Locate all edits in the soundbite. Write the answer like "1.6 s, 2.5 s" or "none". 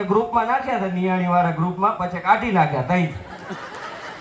none